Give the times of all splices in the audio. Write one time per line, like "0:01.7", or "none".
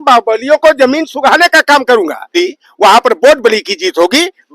0:02.3

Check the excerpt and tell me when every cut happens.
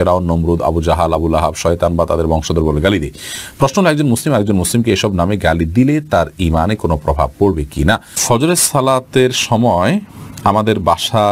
0:08.1

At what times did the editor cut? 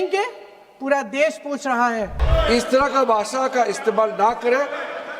0:02.2

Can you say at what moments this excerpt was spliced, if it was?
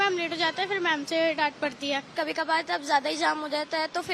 0:02.1

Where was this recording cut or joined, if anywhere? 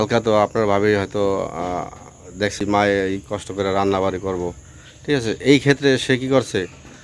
0:02.6

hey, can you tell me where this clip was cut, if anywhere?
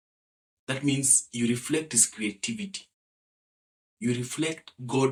none

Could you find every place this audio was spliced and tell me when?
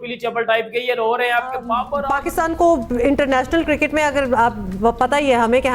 0:02.0

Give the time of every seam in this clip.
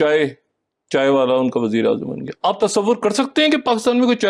none

